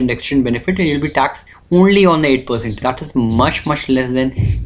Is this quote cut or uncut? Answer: cut